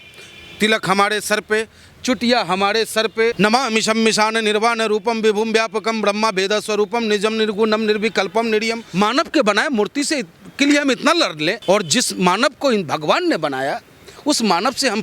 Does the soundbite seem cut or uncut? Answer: cut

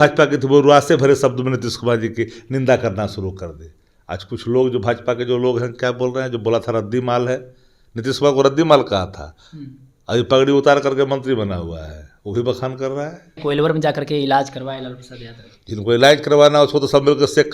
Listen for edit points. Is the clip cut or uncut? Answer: cut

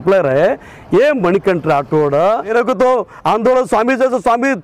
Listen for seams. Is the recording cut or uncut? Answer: cut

